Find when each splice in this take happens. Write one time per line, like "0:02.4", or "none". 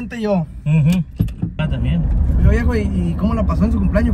0:01.9